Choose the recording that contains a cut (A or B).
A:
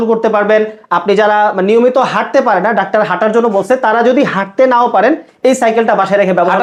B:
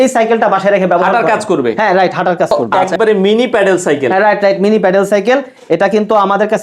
B